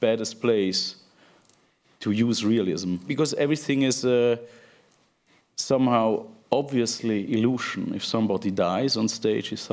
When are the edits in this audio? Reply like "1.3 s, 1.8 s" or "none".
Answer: 3.0 s